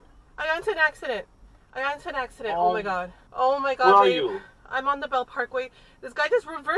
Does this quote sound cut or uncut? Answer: cut